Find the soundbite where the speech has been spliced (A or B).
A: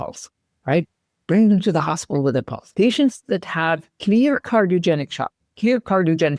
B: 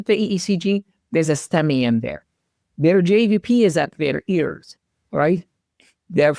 A